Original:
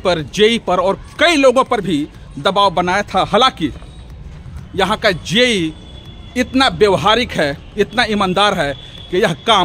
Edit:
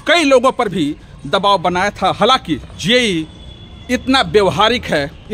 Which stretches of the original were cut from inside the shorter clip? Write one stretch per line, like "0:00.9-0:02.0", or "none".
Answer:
0:03.9-0:05.2